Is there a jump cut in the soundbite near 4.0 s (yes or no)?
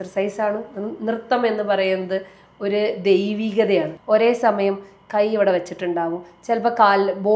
yes